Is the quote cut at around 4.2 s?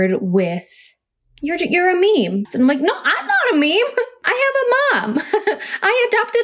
yes; 2 cuts; at 2.5 s, 4.2 s

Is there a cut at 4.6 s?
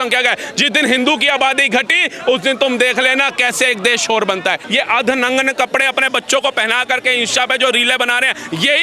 yes; 1 cut; at 4.6 s

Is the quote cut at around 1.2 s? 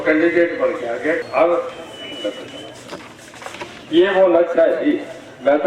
yes; 1 cut; at 1.2 s

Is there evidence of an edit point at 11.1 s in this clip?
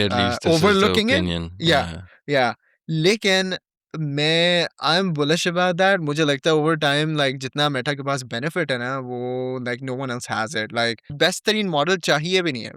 yes; 1 cut; at 11.1 s

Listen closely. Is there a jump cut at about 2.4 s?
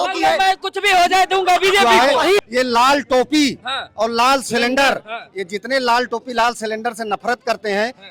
yes; 1 cut; at 2.4 s

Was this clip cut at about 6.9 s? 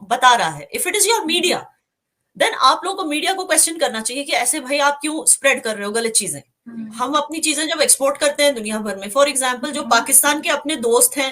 yes; 1 cut; at 6.9 s

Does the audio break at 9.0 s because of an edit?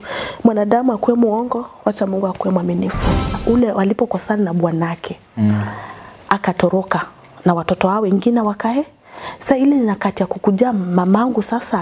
no; 1 cut; at 3.4 s

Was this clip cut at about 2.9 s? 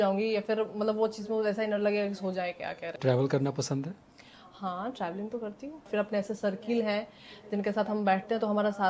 yes; 2 cuts; at 2.9 s, 5.9 s

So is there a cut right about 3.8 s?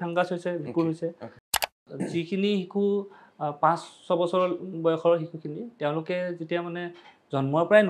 no; 1 cut; at 1.7 s

